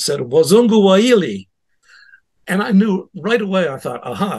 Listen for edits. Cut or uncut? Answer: uncut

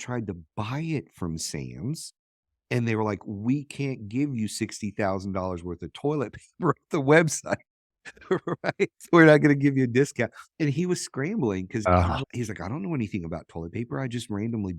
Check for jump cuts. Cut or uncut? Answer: uncut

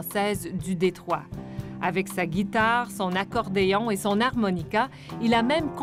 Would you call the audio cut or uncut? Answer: uncut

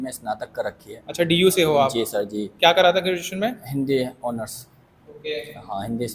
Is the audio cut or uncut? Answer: uncut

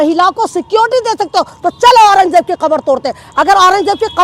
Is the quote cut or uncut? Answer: uncut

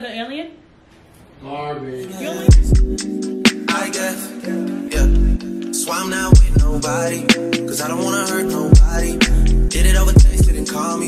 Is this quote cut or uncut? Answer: cut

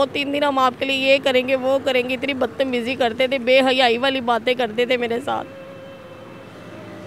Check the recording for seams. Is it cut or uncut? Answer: uncut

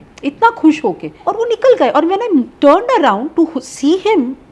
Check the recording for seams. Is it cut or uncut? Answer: cut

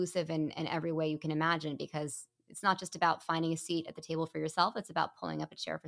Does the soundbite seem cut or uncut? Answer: uncut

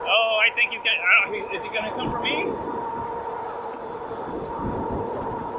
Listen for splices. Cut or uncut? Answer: uncut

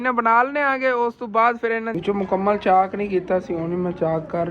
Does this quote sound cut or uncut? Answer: cut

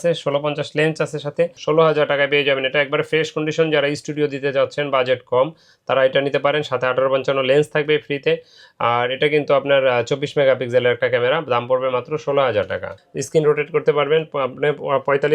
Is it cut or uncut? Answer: cut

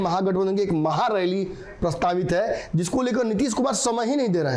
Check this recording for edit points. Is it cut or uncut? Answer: uncut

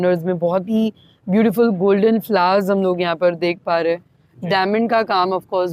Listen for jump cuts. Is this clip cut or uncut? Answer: uncut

